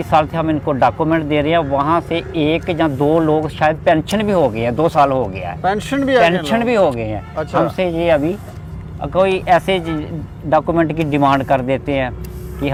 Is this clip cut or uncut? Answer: uncut